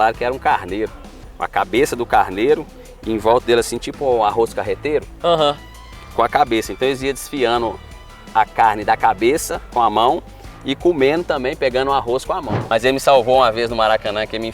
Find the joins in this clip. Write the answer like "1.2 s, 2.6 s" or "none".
12.5 s